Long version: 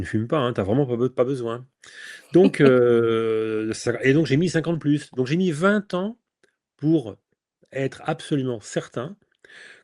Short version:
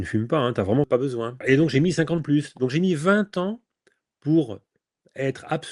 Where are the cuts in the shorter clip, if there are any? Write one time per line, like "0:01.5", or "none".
0:00.9